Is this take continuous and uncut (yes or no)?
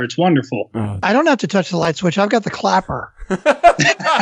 no